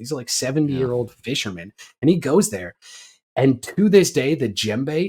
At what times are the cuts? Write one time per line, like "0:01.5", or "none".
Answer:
none